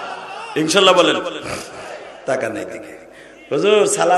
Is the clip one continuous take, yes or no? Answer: no